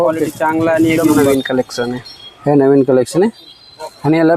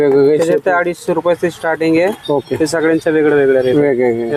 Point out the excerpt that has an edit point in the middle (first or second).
first